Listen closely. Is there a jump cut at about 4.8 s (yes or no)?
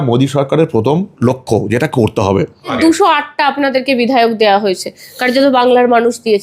no